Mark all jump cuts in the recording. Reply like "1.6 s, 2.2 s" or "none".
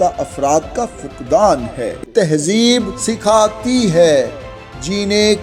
2.0 s